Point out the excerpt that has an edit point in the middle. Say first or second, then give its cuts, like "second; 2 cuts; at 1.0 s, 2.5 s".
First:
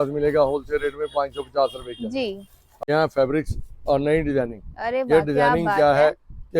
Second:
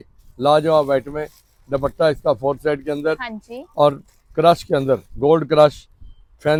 first; 1 cut; at 2.7 s